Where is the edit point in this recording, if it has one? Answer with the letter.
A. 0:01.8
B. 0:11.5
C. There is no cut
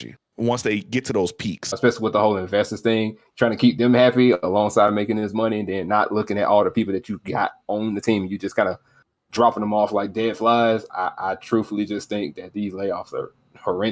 A